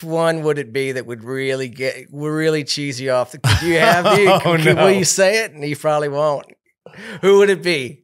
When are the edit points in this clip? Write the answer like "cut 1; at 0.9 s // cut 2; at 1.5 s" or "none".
none